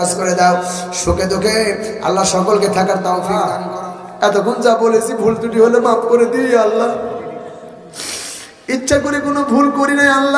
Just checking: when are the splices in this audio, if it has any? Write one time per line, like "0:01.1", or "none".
0:03.6